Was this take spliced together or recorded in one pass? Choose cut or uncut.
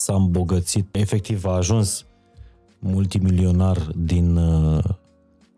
cut